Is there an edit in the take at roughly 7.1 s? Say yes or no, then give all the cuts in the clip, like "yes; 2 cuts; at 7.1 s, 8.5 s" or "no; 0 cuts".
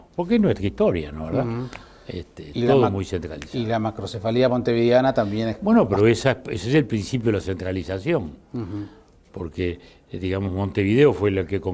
no; 1 cut; at 3.8 s